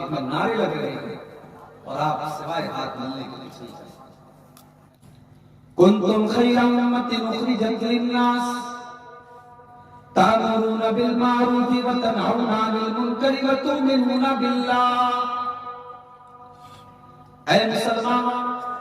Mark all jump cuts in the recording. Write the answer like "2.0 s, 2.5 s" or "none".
5.0 s